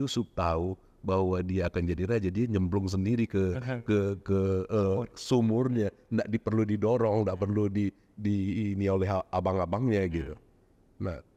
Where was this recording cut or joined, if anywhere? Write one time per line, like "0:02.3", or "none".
none